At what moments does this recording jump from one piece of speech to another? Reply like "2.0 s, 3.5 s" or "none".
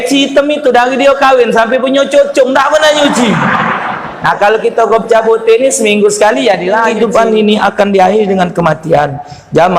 6.9 s